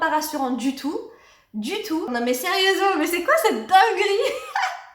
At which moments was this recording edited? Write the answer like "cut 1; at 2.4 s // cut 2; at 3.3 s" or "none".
cut 1; at 2.1 s